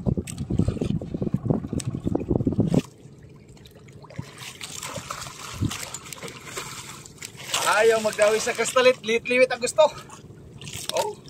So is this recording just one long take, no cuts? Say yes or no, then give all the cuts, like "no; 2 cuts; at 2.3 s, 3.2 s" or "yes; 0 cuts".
no; 1 cut; at 2.9 s